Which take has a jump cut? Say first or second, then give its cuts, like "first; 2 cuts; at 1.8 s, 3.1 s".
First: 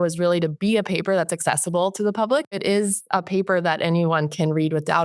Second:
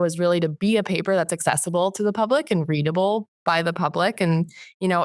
first; 1 cut; at 2.5 s